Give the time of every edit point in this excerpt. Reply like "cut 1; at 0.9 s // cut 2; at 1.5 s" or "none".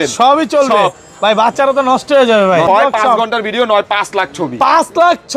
cut 1; at 2.7 s